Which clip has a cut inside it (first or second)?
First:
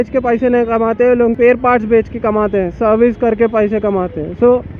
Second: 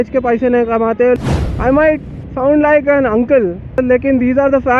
second